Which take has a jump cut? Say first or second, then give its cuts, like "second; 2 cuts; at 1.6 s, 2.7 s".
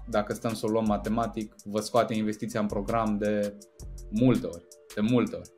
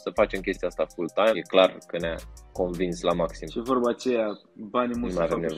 second; 1 cut; at 1.4 s